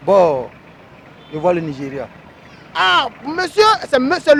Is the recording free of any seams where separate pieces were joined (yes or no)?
yes